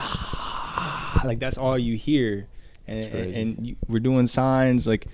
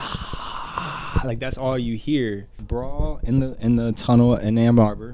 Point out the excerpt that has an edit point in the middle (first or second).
second